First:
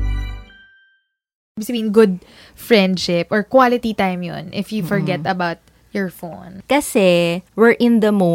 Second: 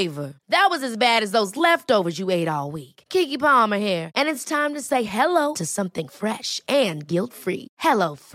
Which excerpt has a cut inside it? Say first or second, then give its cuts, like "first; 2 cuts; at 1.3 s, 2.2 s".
first; 1 cut; at 1.5 s